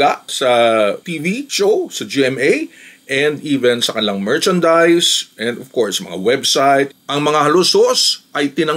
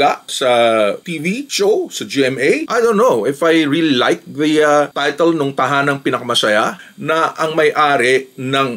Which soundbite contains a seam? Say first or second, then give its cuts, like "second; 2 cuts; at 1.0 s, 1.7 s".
second; 2 cuts; at 2.7 s, 6.8 s